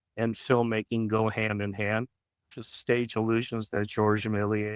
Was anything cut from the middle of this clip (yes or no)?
yes